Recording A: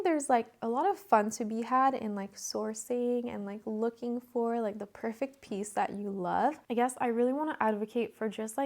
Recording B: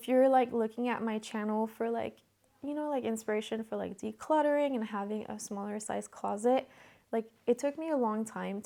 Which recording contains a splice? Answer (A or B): A